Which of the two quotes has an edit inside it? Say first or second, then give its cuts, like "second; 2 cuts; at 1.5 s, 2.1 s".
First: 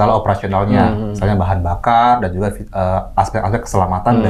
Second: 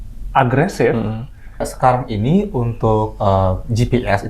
second; 1 cut; at 1.7 s